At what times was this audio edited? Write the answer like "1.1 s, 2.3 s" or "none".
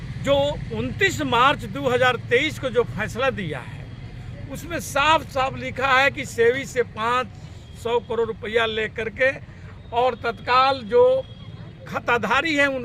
none